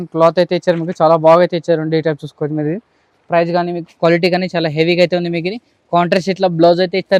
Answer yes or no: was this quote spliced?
no